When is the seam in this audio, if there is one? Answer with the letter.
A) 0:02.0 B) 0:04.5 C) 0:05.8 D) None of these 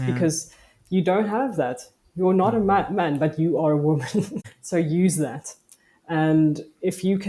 B